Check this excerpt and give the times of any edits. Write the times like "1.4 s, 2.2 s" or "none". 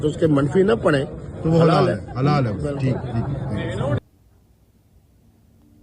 3.7 s